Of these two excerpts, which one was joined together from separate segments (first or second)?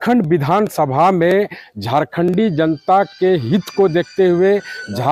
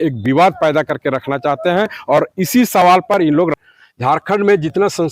second